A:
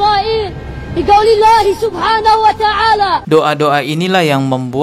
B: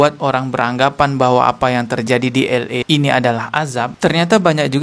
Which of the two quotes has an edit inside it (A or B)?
A